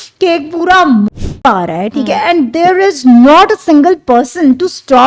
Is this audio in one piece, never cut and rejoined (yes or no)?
yes